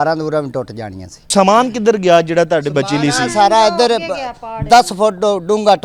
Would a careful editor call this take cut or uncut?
cut